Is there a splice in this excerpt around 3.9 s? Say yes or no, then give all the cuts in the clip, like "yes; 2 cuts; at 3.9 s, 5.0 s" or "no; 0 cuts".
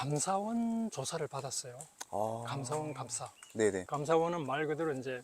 yes; 1 cut; at 3.9 s